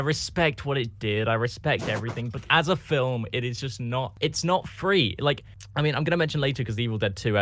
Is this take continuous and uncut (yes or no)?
no